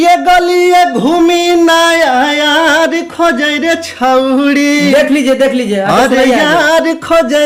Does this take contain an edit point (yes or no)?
no